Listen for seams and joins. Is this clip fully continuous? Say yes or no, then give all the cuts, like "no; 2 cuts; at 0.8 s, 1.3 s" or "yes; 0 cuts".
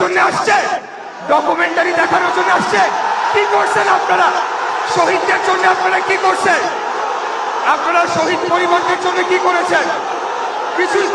yes; 0 cuts